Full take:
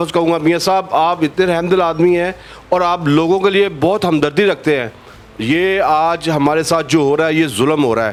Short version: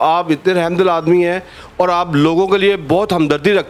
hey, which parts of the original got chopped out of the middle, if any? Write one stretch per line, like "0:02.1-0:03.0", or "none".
none